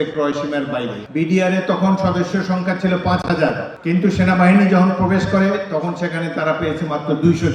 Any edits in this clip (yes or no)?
yes